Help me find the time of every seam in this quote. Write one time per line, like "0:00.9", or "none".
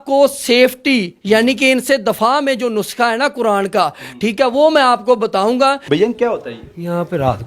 0:05.8